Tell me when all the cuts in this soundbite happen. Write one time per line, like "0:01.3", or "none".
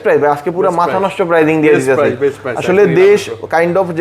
none